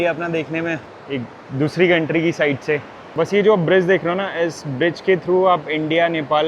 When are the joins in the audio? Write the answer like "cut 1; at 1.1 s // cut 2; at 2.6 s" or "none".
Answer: cut 1; at 0.9 s // cut 2; at 3.0 s